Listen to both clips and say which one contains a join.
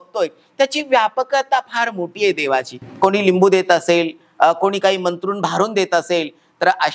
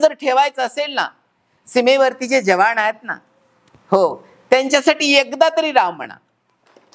first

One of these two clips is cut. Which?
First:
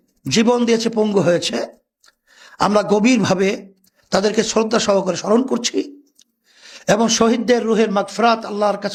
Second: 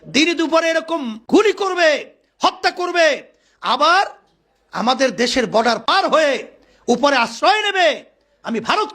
second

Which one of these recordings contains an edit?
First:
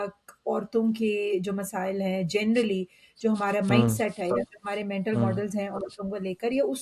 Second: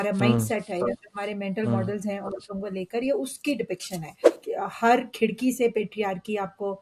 second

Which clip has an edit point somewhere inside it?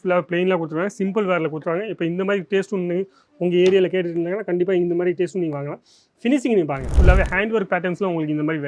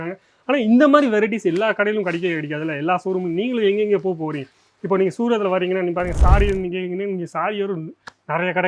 first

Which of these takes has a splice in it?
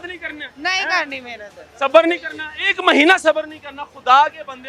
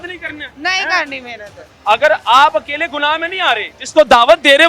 second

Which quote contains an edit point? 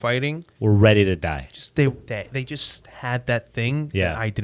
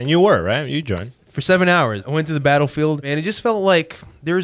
second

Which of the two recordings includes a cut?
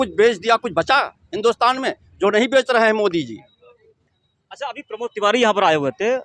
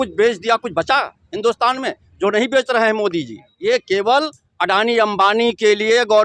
second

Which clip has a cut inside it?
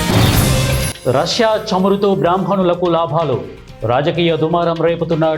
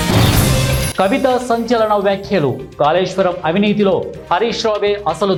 first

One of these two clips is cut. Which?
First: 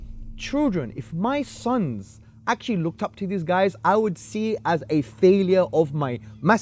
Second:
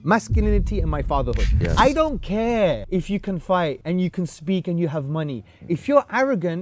second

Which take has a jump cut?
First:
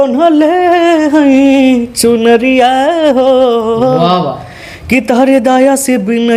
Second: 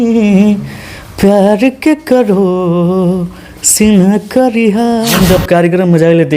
second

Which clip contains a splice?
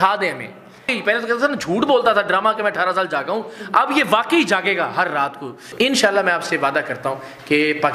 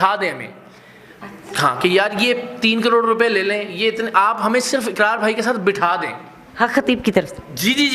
first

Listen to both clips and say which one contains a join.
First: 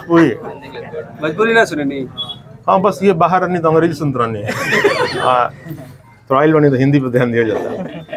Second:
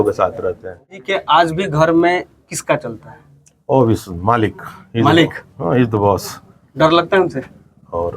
second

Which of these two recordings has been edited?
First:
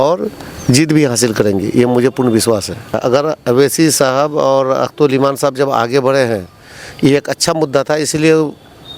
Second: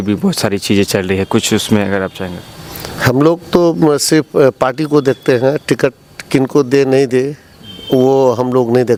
first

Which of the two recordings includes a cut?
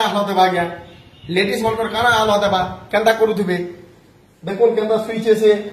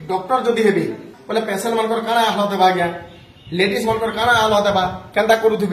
second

